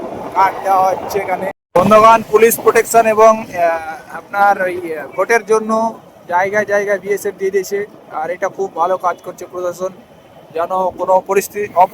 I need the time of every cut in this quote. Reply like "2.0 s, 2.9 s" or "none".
1.8 s